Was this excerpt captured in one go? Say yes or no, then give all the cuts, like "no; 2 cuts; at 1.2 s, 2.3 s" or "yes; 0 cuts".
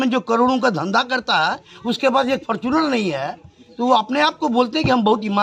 yes; 0 cuts